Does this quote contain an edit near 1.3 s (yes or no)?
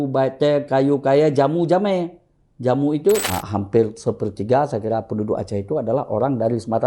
no